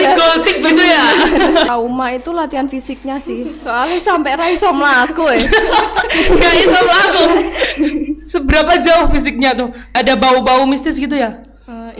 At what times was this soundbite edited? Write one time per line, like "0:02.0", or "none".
0:01.7
0:09.9